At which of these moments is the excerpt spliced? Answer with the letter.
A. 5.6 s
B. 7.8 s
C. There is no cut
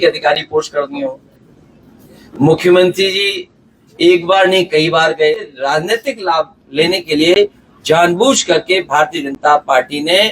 A